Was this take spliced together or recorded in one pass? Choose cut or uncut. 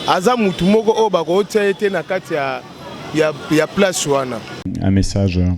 cut